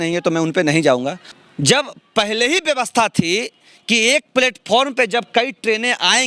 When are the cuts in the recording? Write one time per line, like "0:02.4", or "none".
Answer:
0:01.3